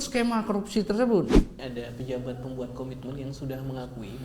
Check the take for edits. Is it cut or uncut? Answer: cut